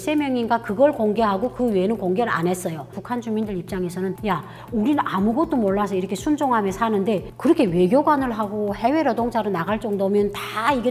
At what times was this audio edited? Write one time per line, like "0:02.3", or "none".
0:02.9

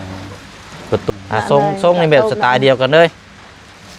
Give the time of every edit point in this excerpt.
0:01.1

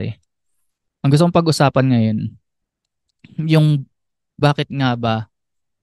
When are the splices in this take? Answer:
none

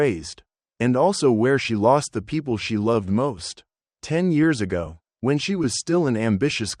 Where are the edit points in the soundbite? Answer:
0:01.8

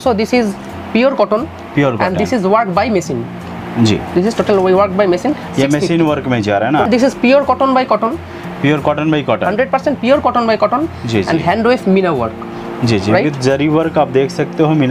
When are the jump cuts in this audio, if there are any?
0:06.9

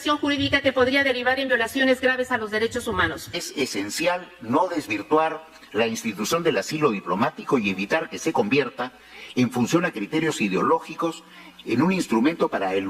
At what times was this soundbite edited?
0:03.4

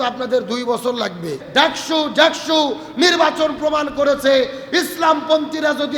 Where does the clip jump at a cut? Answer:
0:01.4

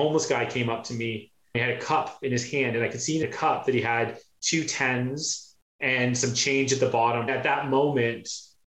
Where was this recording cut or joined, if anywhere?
0:03.2
0:07.3

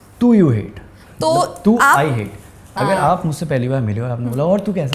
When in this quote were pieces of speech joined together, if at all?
none

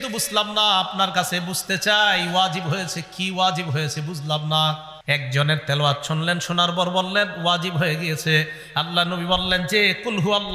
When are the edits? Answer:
0:04.9

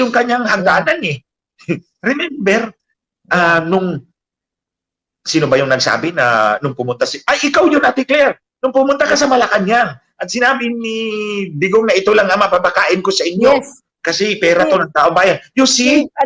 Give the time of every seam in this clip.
none

